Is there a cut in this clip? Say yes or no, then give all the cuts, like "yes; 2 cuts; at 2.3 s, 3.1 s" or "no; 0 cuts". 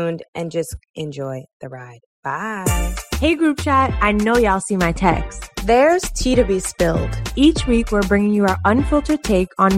no; 0 cuts